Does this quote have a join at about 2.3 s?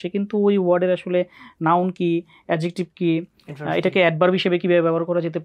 no; 0 cuts

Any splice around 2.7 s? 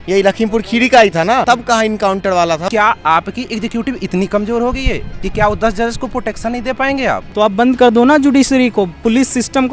yes; 3 cuts; at 1.4 s, 2.7 s, 7.2 s

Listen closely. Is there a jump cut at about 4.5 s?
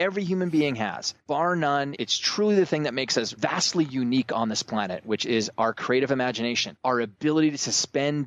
no; 4 cuts; at 1.1 s, 1.9 s, 3.3 s, 6.7 s

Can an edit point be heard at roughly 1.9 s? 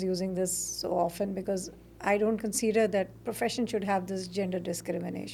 no; 0 cuts

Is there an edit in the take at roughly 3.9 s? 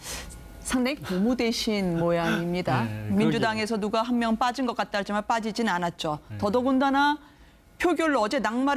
yes; 1 cut; at 3.9 s

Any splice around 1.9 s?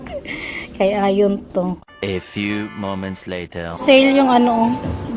yes; 2 cuts; at 1.9 s, 3.6 s

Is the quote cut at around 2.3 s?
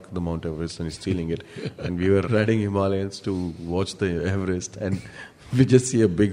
yes; 1 cut; at 2.3 s

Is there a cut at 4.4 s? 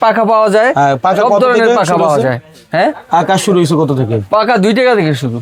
no; 0 cuts

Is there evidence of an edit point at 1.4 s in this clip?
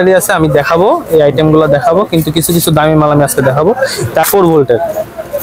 no; 1 cut; at 4.2 s

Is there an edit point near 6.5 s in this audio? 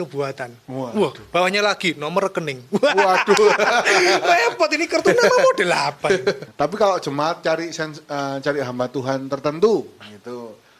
yes; 1 cut; at 6.5 s

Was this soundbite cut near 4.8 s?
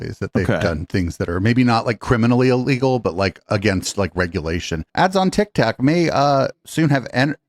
yes; 1 cut; at 4.8 s

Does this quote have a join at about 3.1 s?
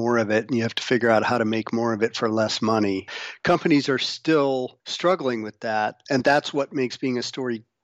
yes; 3 cuts; at 3.1 s, 4.8 s, 6.0 s

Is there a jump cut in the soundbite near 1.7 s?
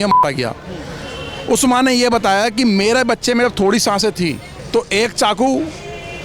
no; 1 cut; at 4.5 s

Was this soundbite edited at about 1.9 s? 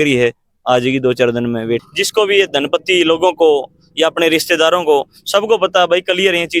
yes; 1 cut; at 1.9 s

